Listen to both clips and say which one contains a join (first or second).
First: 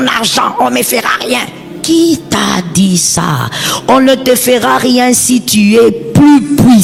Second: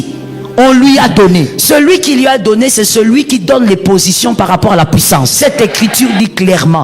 second